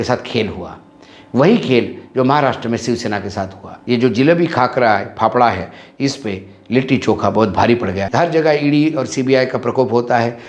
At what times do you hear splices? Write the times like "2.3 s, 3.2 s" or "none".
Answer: 3.7 s, 8.0 s